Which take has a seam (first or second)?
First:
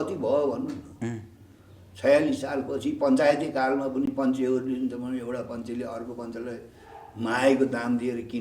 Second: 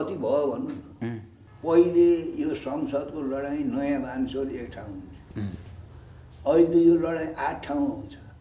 second